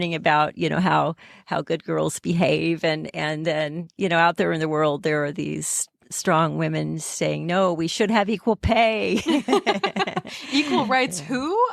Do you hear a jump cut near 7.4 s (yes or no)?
no